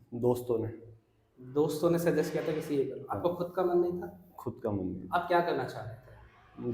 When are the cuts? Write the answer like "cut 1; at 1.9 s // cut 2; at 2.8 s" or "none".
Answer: none

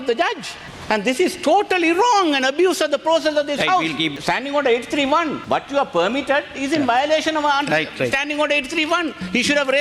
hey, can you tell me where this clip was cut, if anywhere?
cut 1; at 4.1 s // cut 2; at 5.4 s

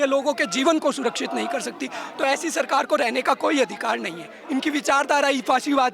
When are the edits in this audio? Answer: cut 1; at 4.3 s

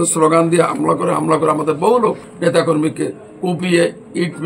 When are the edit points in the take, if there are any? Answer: cut 1; at 2.3 s

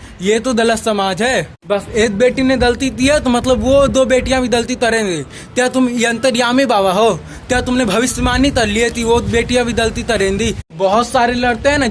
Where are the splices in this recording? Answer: cut 1; at 1.5 s // cut 2; at 10.7 s

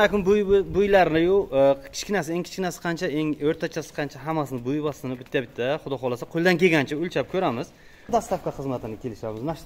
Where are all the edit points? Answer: cut 1; at 8.0 s

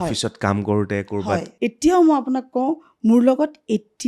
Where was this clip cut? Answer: cut 1; at 1.5 s

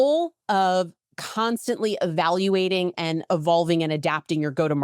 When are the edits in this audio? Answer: none

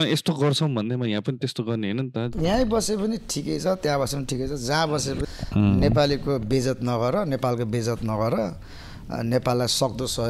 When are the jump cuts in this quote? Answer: cut 1; at 2.3 s

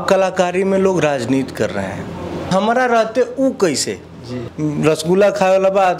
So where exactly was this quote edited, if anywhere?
cut 1; at 2.5 s // cut 2; at 4.4 s

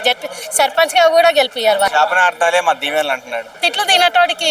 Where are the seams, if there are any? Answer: cut 1; at 1.9 s // cut 2; at 3.6 s

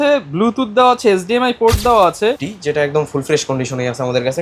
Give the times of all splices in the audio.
cut 1; at 2.4 s

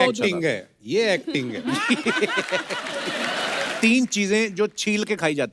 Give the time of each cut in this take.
cut 1; at 3.7 s

